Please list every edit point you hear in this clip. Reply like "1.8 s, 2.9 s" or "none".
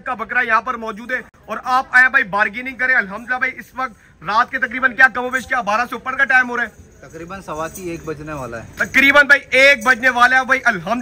none